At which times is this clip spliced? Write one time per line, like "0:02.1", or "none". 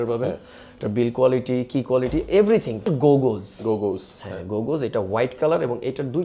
0:02.9